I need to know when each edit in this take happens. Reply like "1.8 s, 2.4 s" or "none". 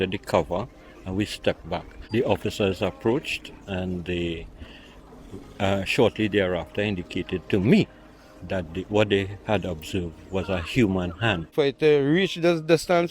2.0 s, 11.4 s